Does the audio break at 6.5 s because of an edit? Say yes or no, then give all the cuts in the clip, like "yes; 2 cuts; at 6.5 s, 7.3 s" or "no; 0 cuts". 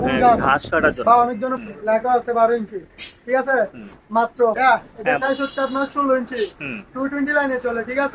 no; 2 cuts; at 1.5 s, 4.6 s